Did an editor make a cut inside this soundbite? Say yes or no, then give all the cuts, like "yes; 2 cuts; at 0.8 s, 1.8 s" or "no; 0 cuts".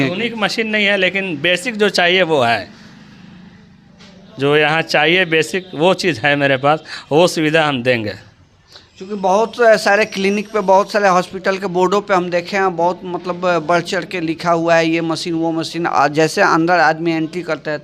no; 0 cuts